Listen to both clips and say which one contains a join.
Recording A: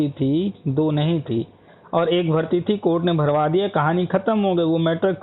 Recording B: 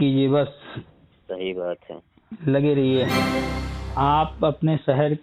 B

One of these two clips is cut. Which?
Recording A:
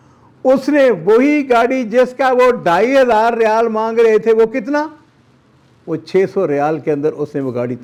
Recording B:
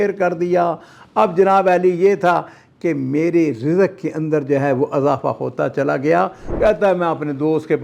B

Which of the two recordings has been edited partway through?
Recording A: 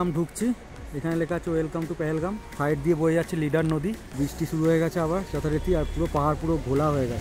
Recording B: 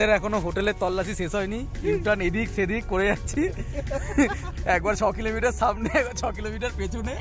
A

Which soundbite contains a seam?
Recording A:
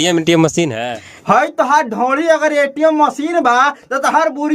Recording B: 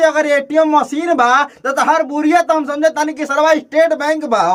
A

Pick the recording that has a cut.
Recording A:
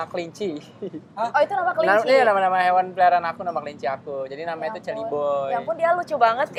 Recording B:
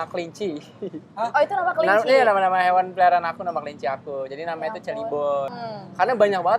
B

